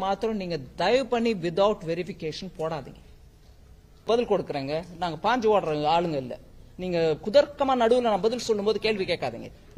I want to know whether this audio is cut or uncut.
cut